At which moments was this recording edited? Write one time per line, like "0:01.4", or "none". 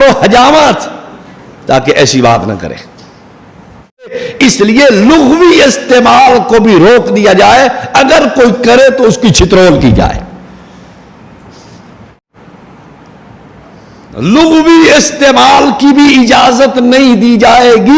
0:04.1
0:12.3